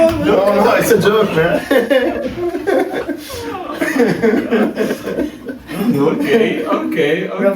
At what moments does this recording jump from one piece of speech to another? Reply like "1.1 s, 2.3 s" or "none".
none